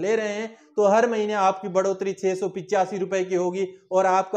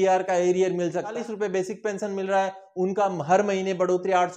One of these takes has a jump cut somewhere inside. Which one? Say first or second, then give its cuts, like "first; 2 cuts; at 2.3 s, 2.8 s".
second; 1 cut; at 1.2 s